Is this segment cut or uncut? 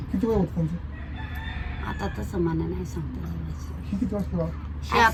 uncut